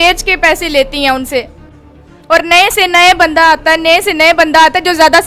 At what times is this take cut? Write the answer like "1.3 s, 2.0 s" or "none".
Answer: none